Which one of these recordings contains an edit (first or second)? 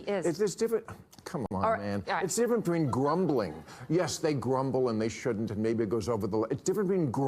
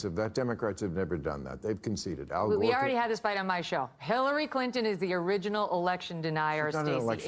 first